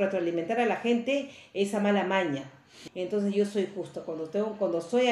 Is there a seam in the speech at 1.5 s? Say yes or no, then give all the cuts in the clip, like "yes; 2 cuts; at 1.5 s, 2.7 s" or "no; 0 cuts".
no; 1 cut; at 2.8 s